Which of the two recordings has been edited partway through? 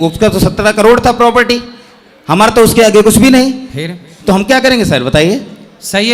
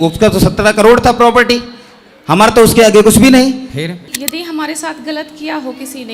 second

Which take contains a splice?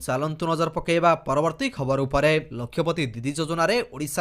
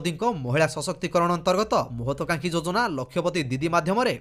first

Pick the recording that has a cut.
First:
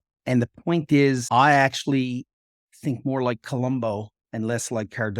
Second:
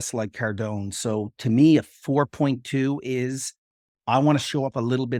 first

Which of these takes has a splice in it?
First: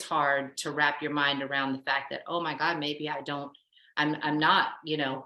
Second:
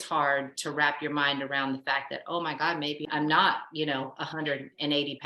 second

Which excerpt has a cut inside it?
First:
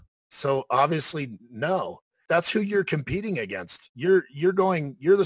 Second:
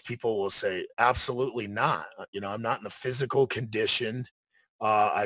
first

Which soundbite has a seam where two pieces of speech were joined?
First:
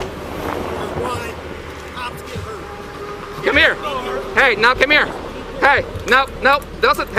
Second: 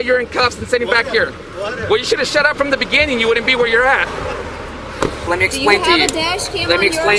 second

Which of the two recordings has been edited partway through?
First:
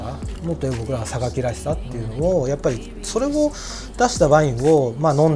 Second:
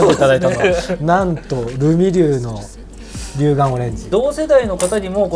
second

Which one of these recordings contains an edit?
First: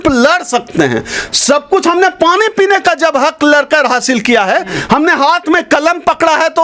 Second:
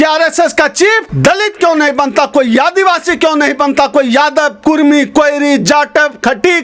second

